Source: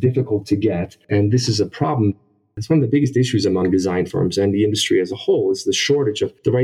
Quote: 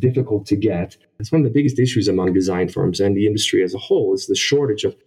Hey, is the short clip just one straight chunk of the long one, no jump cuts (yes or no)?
no